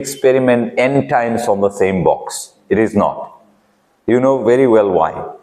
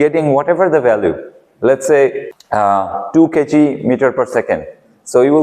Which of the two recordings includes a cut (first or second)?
second